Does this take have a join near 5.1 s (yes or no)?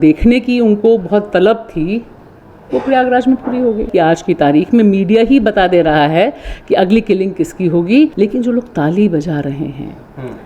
no